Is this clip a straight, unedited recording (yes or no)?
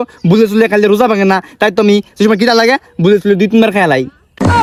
yes